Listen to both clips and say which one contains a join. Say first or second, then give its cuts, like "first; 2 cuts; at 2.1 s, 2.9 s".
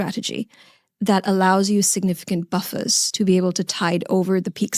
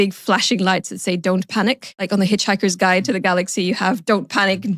second; 1 cut; at 1.9 s